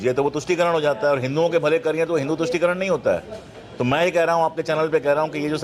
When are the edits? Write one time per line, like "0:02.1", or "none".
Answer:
none